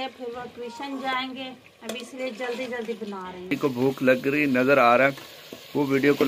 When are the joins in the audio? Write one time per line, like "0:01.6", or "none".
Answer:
0:03.6